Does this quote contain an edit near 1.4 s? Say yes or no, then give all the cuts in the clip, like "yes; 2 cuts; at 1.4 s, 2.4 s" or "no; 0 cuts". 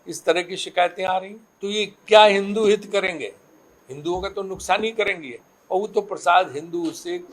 yes; 1 cut; at 1.4 s